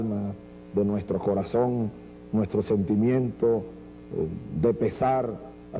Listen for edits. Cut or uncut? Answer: cut